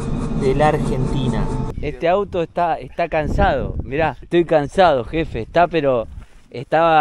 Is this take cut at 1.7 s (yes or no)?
yes